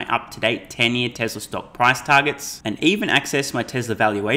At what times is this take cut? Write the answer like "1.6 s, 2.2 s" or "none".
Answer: none